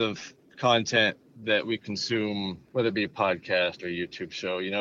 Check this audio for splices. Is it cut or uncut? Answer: cut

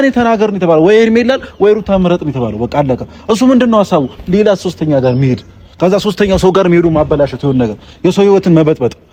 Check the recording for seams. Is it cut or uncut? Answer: uncut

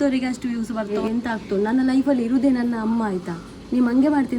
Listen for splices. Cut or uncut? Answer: cut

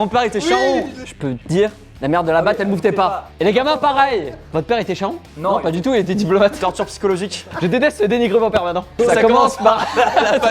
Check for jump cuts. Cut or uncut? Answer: uncut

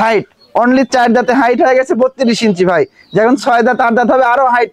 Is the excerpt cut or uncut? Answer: uncut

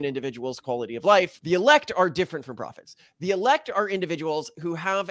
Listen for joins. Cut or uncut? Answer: cut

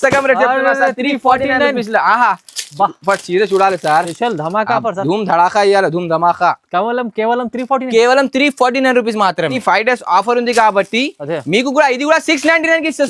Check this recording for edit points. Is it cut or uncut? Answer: cut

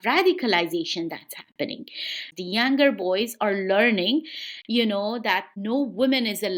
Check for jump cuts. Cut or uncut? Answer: cut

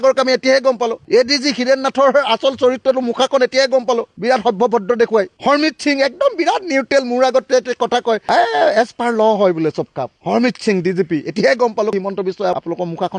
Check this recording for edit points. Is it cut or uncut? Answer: uncut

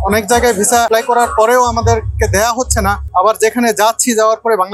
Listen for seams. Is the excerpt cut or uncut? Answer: cut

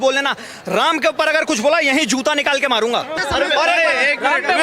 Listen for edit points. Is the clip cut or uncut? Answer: cut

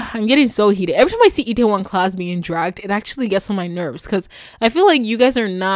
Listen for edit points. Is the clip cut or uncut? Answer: uncut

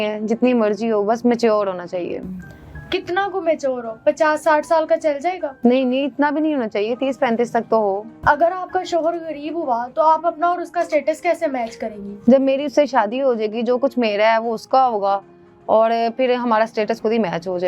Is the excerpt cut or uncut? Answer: uncut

